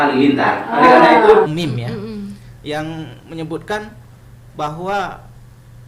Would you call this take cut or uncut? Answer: cut